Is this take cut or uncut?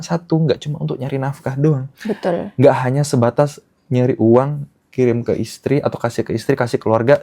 uncut